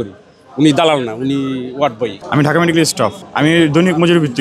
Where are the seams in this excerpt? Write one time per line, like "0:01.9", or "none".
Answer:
0:02.2
0:03.2